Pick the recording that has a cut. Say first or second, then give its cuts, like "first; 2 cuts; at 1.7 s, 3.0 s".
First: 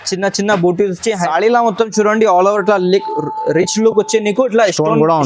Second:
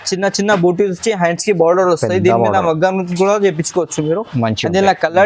first; 1 cut; at 1.2 s